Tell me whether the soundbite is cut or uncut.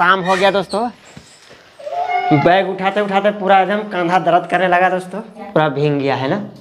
cut